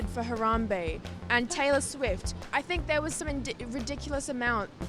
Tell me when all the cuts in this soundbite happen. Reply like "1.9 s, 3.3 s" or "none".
none